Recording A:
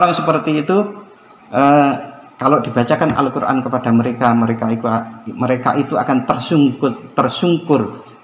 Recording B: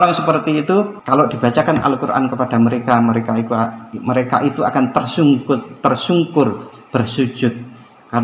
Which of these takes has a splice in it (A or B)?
B